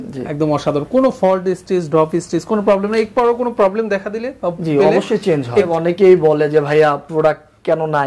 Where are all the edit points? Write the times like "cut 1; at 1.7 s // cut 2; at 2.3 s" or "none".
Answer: cut 1; at 5.7 s